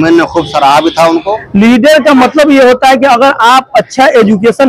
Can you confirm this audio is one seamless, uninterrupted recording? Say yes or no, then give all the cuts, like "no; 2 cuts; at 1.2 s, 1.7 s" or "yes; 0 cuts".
no; 1 cut; at 1.3 s